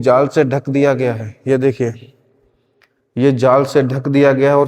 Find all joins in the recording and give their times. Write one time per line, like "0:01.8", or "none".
none